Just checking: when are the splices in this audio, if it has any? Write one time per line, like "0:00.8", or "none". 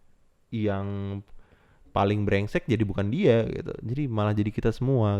none